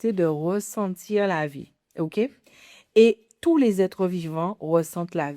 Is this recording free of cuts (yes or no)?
yes